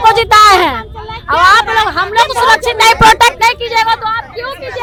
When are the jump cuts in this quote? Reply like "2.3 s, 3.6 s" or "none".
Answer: none